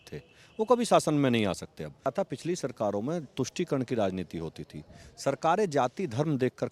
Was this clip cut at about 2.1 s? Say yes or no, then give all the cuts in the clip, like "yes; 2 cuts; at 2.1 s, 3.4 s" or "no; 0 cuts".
yes; 1 cut; at 2.1 s